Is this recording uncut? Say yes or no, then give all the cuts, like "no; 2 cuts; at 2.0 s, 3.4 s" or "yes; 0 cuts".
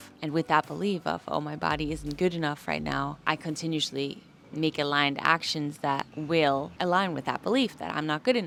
yes; 0 cuts